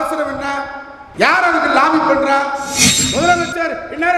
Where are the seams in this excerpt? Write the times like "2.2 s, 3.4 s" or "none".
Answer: 2.7 s